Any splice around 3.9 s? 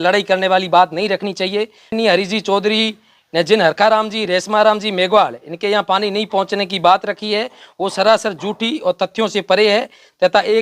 no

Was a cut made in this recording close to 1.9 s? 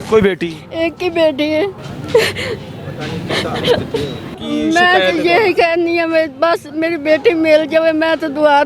yes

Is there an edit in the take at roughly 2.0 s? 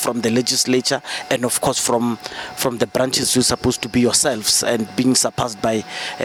no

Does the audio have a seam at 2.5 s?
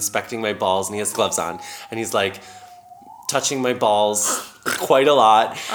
no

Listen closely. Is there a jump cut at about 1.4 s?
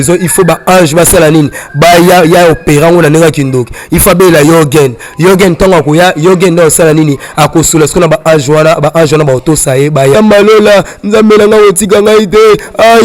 no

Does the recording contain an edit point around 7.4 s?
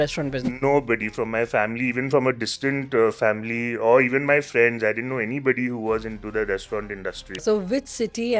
yes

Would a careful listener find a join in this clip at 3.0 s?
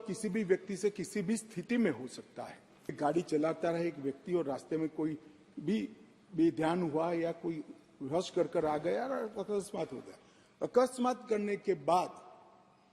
yes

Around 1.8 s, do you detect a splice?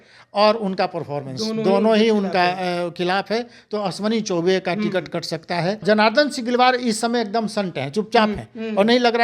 no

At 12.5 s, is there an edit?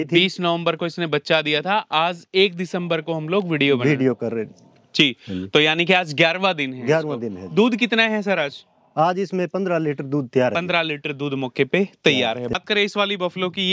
yes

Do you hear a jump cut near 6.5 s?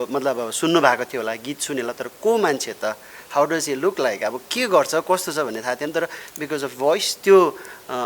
no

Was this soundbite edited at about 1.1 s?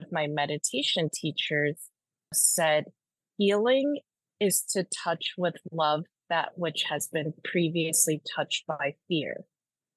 no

